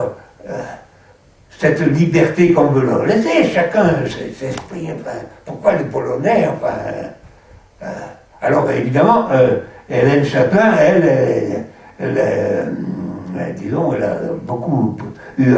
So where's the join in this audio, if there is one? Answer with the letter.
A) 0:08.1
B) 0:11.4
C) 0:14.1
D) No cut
B